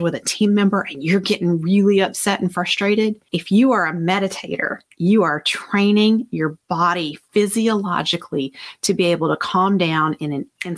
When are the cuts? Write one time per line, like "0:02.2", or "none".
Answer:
none